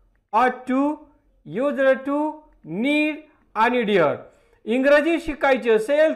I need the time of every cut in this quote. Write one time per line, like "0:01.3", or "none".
0:04.0